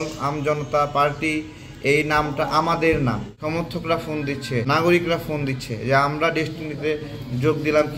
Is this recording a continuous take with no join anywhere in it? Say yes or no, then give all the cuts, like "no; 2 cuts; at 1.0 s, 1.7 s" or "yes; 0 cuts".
no; 2 cuts; at 3.3 s, 4.6 s